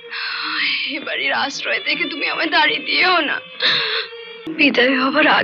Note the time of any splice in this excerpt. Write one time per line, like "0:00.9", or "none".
0:04.5